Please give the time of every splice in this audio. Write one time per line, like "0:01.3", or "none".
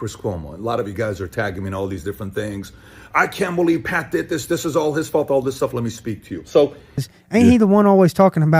0:07.1